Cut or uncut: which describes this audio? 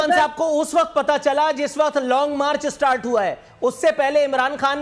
uncut